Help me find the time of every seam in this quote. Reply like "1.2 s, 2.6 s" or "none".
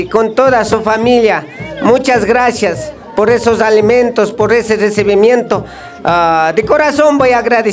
none